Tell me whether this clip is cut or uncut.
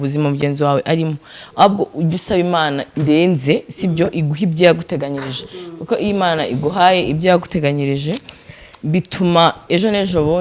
uncut